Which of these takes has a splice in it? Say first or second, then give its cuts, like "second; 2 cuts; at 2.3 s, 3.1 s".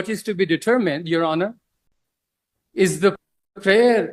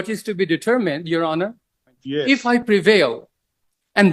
second; 1 cut; at 2.0 s